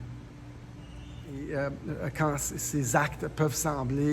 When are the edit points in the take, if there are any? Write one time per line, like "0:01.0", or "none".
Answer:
0:01.4